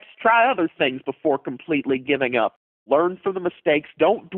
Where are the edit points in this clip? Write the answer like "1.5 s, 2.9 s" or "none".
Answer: 2.8 s